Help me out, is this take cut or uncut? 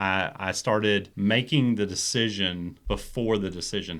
cut